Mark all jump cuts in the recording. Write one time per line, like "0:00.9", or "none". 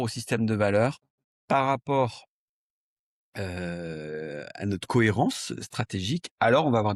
none